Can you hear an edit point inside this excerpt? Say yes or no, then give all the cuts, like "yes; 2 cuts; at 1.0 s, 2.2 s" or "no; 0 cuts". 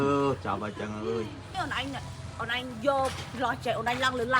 yes; 1 cut; at 1.6 s